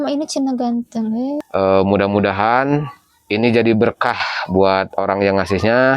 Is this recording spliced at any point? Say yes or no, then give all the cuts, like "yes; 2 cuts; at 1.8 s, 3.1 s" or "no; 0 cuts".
yes; 1 cut; at 1.4 s